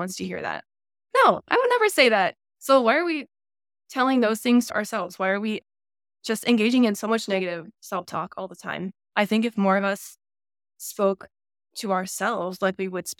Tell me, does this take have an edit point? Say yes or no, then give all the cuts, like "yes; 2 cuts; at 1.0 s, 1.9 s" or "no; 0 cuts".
yes; 1 cut; at 4.7 s